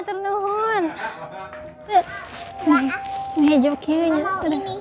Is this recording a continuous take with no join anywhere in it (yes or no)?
no